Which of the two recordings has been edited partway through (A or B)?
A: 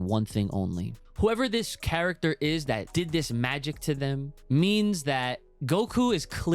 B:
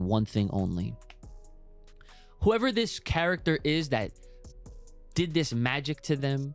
A